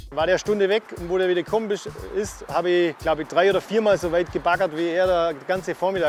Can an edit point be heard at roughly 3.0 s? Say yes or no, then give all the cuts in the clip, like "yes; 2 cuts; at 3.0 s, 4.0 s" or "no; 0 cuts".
yes; 1 cut; at 3.0 s